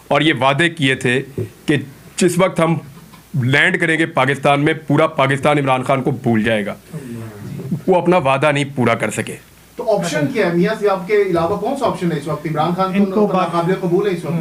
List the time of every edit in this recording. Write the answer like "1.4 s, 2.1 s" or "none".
none